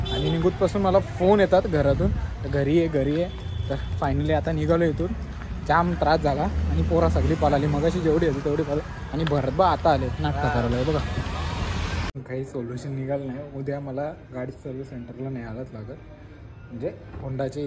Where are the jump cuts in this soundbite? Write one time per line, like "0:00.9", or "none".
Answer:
0:12.1